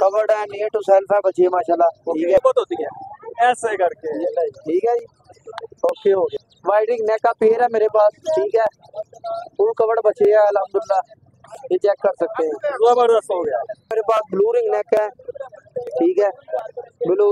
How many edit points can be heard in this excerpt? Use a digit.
3